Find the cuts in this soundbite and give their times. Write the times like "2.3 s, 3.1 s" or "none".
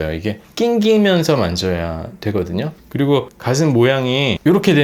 2.8 s